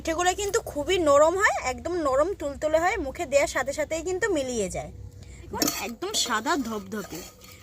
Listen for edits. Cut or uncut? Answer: cut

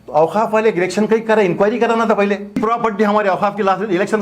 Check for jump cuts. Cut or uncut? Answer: cut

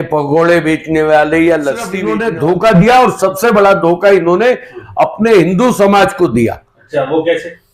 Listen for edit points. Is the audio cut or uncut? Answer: cut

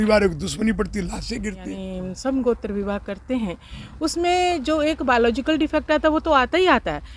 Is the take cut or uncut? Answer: cut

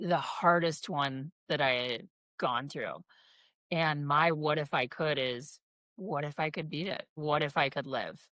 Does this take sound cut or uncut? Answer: cut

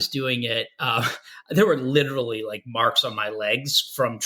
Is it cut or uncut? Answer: uncut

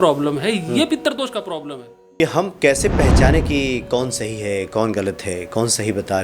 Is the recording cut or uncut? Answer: cut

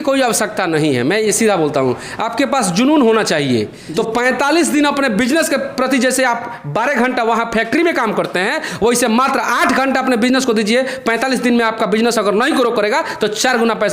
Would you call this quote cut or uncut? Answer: cut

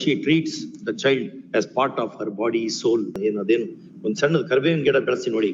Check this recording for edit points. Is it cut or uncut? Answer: cut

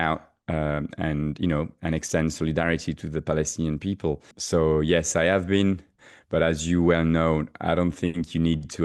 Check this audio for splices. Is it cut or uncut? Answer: cut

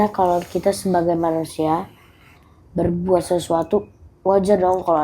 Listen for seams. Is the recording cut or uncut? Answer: uncut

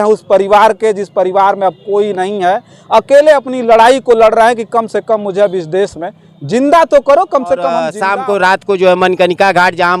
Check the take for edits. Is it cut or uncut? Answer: cut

